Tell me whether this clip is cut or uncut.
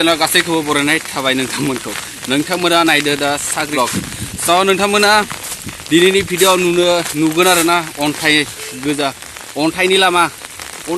cut